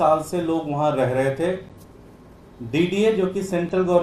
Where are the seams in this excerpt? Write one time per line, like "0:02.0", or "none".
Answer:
none